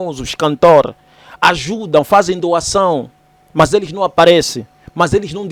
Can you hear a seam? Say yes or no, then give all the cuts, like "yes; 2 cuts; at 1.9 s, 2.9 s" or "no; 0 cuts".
no; 0 cuts